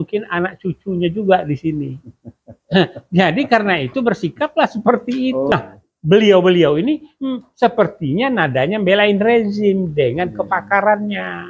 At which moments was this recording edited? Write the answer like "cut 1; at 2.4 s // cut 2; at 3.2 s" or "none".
cut 1; at 5.5 s